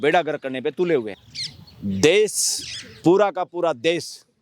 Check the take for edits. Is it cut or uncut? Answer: cut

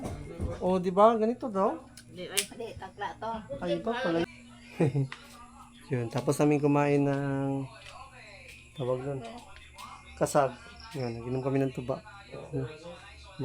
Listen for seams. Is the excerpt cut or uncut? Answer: cut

